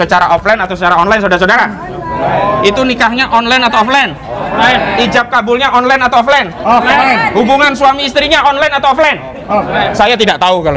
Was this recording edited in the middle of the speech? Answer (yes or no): no